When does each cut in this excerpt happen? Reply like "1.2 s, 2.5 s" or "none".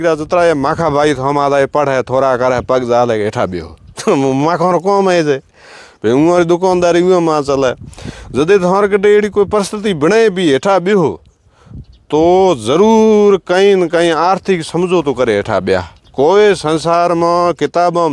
none

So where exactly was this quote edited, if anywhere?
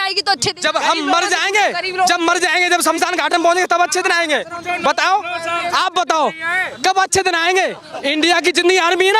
7.9 s

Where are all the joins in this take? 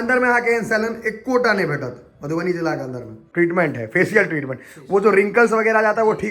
3.1 s

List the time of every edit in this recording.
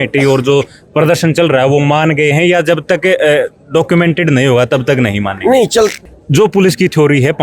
6.1 s

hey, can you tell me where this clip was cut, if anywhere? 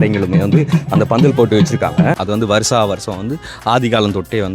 2.2 s

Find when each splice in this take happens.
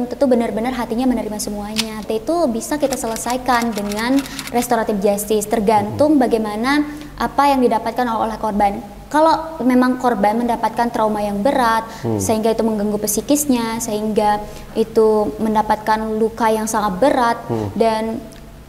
2.0 s

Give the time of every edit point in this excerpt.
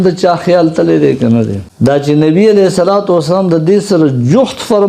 1.6 s

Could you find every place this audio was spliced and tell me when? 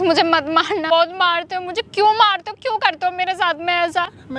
0.9 s

